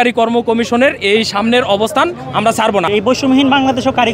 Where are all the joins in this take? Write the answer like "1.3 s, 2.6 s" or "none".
2.9 s